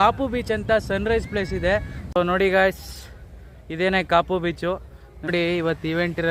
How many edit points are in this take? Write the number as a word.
two